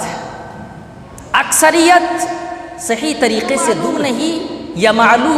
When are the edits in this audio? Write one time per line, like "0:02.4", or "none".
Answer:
0:04.0